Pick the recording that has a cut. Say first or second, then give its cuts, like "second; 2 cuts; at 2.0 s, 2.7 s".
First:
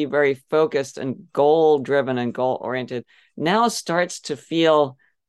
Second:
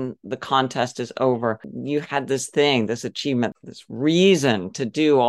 second; 2 cuts; at 1.7 s, 3.5 s